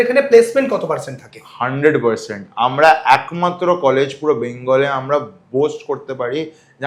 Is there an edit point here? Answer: no; 0 cuts

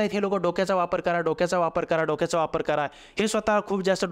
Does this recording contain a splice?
no; 0 cuts

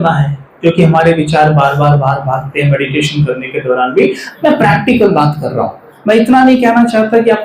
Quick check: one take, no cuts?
no; 1 cut; at 4.2 s

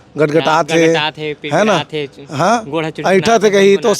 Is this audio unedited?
yes; 0 cuts

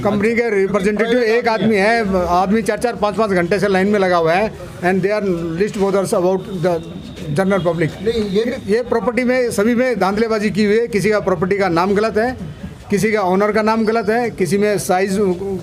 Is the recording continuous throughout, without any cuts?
yes; 0 cuts

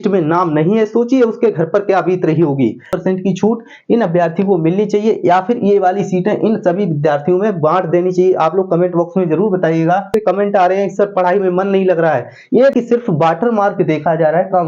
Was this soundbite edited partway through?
yes; 3 cuts; at 2.9 s, 10.1 s, 12.7 s

